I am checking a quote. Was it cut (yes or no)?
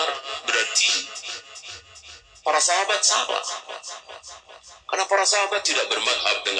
no